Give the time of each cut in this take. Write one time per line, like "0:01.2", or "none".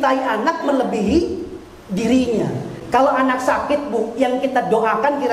none